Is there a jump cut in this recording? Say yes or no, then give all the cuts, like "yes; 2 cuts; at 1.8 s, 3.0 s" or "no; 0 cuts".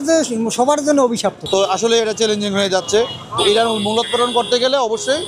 yes; 1 cut; at 1.4 s